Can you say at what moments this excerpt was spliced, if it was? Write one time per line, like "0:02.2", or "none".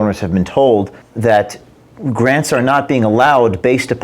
0:01.0